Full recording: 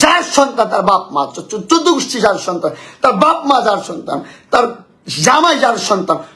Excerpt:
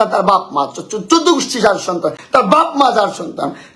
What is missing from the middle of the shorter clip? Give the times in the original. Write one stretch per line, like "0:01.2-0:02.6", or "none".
0:02.8-0:02.9